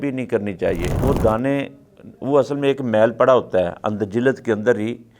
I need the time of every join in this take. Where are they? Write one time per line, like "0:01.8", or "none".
0:00.9